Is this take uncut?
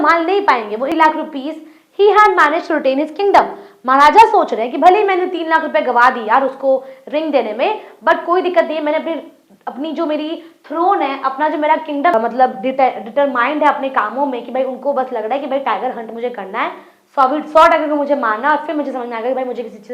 no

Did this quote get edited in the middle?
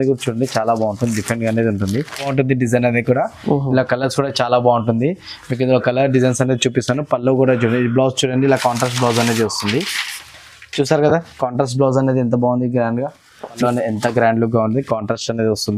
yes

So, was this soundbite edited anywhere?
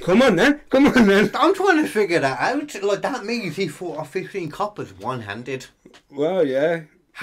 no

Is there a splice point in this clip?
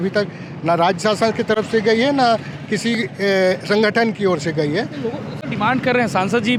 no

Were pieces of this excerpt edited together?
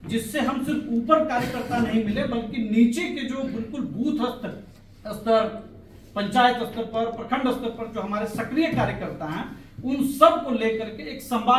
no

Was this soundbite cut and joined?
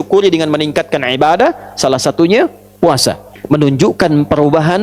yes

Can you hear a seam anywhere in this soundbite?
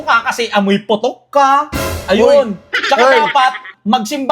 no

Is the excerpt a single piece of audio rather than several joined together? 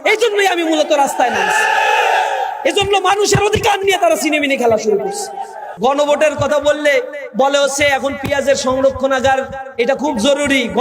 no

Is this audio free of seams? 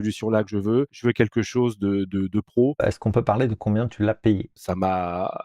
no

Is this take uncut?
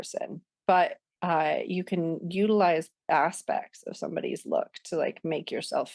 no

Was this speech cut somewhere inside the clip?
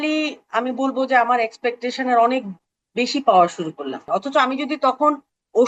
yes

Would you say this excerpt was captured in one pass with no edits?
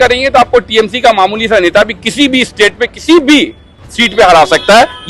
yes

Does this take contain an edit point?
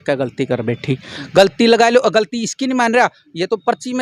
no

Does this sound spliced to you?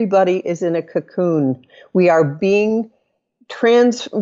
no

